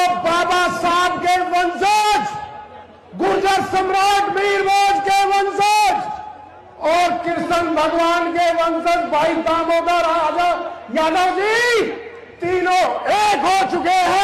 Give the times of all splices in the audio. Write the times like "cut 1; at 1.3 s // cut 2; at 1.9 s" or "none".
none